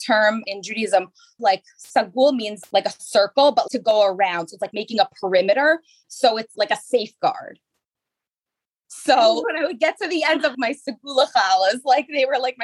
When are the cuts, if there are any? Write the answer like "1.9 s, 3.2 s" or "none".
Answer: 1.4 s, 9.4 s